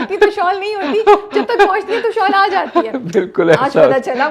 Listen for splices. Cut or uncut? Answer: uncut